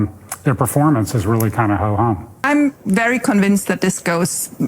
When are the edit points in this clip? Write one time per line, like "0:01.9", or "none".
0:02.4